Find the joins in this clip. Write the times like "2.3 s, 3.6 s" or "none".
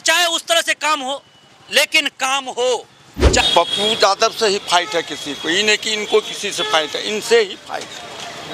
3.4 s